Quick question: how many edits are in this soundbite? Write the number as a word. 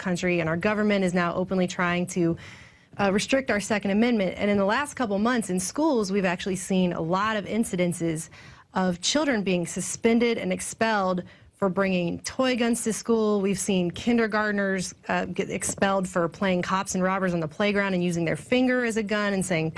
one